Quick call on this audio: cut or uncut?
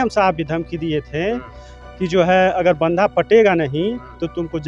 uncut